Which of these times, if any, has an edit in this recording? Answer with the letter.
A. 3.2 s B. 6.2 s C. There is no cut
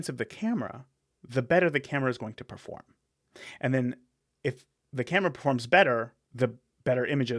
B